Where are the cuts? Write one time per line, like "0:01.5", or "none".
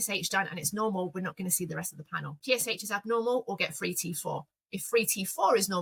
none